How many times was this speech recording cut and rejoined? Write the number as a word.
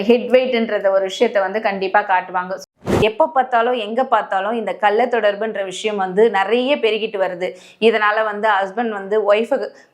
one